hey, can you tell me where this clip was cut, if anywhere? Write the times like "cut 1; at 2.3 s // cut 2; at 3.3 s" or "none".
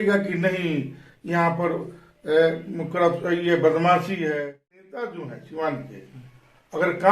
cut 1; at 4.4 s

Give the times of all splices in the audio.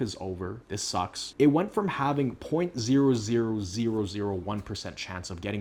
none

